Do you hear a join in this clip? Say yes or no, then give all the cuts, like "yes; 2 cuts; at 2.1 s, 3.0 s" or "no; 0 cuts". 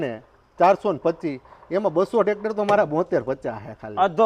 no; 0 cuts